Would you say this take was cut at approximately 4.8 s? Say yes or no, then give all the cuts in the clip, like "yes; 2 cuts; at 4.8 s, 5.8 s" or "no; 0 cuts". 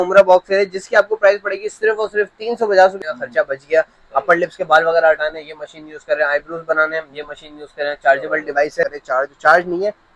no; 2 cuts; at 3.0 s, 8.8 s